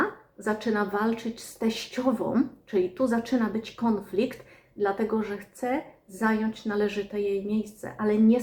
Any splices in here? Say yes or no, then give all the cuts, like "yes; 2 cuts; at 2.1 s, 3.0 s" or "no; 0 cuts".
no; 0 cuts